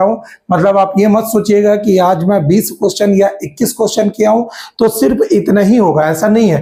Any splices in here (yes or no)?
no